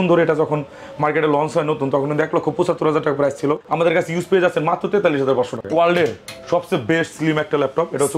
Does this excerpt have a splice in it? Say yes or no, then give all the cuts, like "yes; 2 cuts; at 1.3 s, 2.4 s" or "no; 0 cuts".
yes; 2 cuts; at 3.7 s, 5.6 s